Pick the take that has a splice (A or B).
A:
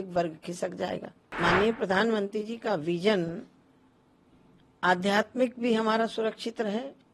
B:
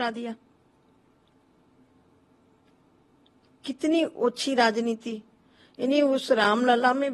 A